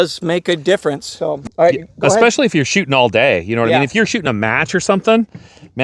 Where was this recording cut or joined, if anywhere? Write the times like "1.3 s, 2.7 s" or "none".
1.1 s